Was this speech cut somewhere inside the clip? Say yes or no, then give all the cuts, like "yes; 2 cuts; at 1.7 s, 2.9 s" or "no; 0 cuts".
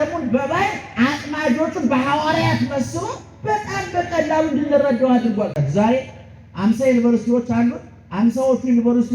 yes; 1 cut; at 5.6 s